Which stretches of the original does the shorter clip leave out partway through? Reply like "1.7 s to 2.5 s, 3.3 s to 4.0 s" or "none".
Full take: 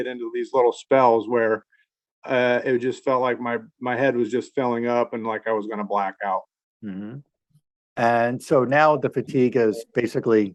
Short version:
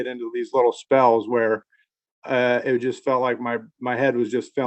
none